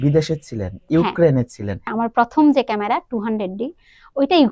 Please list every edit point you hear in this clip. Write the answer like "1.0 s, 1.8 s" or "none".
1.9 s